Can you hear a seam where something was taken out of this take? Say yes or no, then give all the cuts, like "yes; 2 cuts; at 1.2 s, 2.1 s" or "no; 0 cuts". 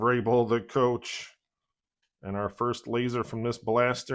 no; 0 cuts